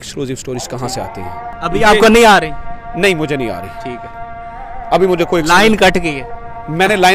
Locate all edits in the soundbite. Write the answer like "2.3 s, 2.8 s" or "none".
1.5 s